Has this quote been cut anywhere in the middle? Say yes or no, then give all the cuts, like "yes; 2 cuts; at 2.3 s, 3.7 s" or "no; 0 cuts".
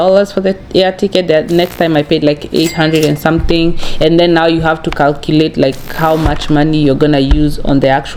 no; 0 cuts